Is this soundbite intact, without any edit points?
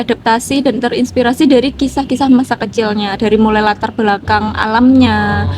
yes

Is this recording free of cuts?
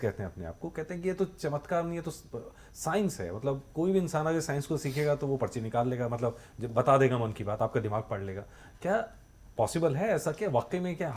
yes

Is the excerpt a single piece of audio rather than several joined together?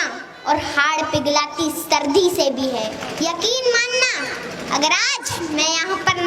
no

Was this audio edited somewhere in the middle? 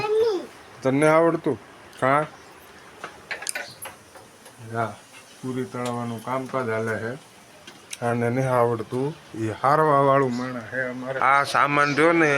yes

